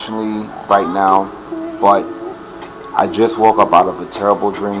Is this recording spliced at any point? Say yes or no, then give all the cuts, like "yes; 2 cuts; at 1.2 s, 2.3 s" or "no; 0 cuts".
yes; 1 cut; at 3.1 s